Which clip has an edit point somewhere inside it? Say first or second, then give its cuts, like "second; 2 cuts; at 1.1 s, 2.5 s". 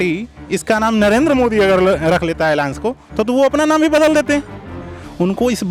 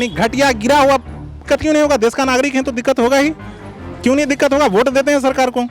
second; 1 cut; at 1.4 s